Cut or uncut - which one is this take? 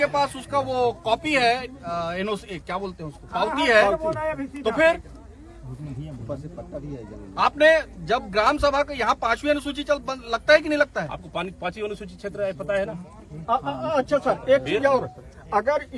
uncut